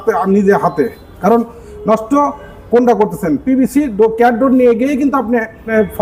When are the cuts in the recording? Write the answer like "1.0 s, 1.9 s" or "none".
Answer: none